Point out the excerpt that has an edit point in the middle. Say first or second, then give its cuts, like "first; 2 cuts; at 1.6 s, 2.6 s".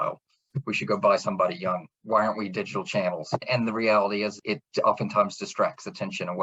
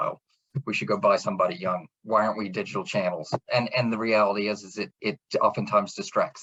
first; 2 cuts; at 3.4 s, 4.4 s